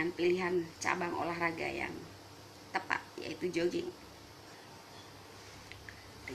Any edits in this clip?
yes; 1 cut; at 4.6 s

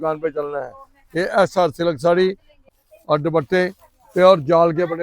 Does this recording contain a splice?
yes; 1 cut; at 2.6 s

